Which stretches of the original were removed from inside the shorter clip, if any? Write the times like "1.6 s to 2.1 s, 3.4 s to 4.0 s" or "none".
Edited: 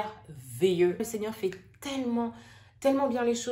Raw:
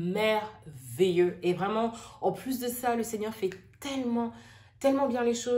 1.4 s to 3.0 s